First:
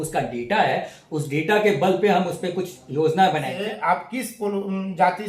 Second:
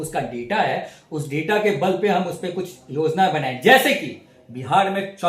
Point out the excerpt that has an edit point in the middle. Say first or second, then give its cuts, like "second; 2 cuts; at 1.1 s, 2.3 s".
first; 1 cut; at 3.5 s